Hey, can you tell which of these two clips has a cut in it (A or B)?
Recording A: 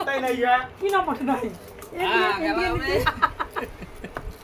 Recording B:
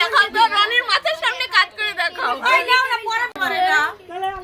B